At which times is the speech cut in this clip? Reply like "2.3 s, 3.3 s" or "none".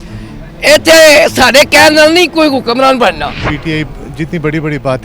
3.5 s